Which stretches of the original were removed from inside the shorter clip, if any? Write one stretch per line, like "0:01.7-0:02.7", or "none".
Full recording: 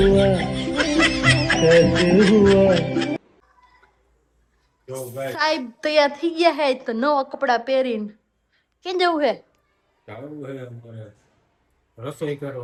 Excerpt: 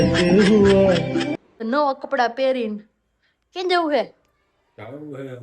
0:03.4-0:06.9